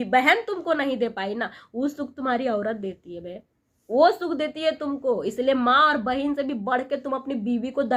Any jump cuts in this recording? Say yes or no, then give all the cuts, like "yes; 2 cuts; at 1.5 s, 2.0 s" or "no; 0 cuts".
no; 0 cuts